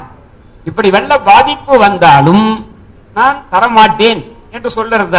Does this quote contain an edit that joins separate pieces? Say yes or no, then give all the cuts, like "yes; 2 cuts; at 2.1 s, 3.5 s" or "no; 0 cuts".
no; 0 cuts